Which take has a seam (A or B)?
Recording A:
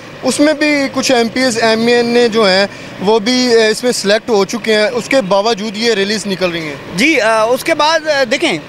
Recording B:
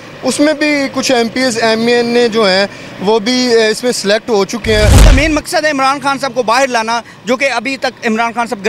B